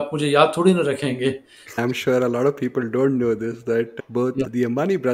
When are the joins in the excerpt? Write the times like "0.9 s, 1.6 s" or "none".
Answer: 1.7 s